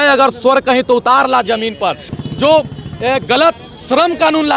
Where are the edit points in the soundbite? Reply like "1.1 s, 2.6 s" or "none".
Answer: 2.1 s